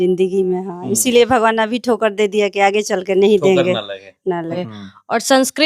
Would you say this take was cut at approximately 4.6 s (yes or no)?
yes